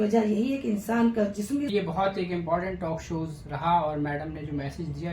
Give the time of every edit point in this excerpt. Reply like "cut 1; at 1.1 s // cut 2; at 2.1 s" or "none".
cut 1; at 1.7 s